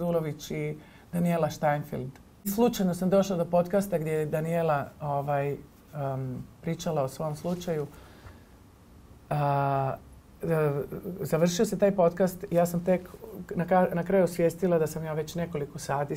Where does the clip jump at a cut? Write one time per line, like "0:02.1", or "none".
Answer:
0:02.5